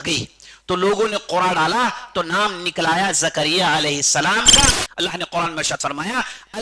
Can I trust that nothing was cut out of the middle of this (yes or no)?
no